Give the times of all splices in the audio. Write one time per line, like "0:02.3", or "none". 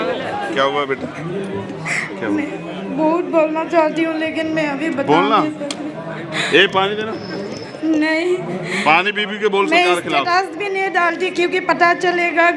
none